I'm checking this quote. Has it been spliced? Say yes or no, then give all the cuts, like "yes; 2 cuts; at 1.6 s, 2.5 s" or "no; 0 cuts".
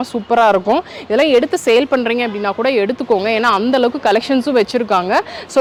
no; 0 cuts